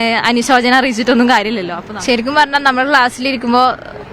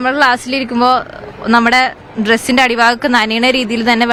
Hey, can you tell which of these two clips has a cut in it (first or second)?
first